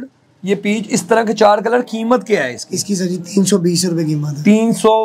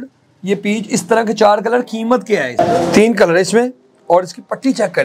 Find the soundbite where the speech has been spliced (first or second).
second